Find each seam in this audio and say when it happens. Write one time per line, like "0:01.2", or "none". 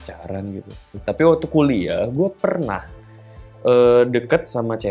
none